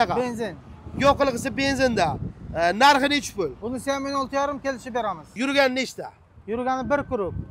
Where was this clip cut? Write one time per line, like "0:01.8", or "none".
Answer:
0:05.2